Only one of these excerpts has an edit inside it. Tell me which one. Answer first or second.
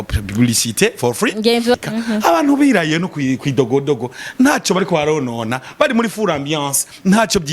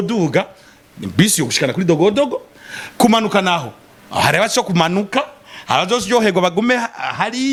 first